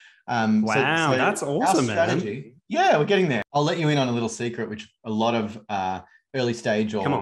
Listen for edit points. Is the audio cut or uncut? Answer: cut